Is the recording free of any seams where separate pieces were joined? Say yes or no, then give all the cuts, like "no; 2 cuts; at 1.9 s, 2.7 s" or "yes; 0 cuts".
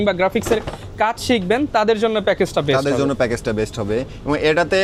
yes; 0 cuts